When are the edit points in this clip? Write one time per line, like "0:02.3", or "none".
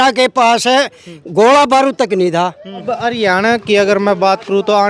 0:02.9